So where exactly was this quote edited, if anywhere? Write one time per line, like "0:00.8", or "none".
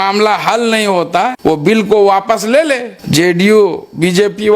0:01.3
0:02.9

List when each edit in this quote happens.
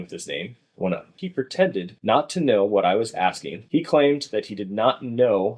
0:01.1
0:03.5

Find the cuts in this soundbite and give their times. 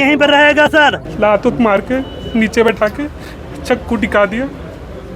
0:01.1

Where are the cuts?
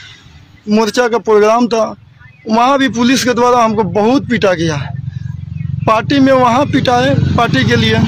none

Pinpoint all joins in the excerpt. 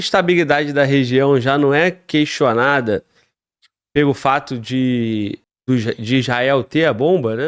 0:05.5

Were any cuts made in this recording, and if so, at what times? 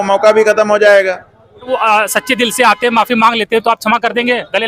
0:01.7

